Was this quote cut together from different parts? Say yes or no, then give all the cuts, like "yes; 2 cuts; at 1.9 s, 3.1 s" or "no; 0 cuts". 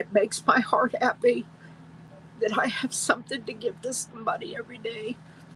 no; 0 cuts